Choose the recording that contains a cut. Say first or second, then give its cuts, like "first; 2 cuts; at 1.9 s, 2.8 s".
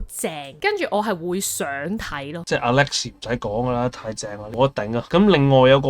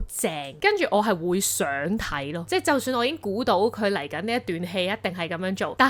first; 1 cut; at 2.4 s